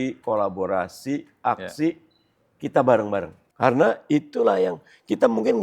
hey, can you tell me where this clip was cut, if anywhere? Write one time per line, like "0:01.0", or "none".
0:03.4